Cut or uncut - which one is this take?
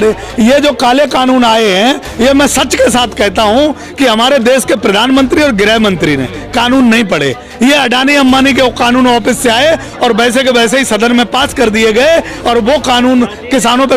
uncut